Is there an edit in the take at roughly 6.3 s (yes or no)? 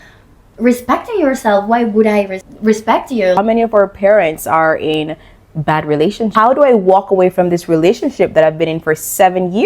yes